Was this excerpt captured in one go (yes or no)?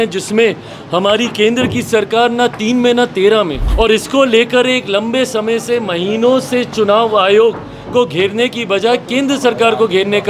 no